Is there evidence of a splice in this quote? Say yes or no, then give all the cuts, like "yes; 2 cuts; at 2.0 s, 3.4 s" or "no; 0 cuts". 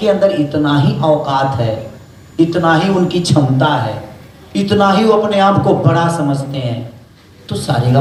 no; 0 cuts